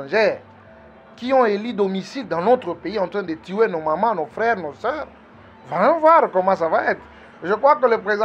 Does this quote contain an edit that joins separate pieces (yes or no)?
no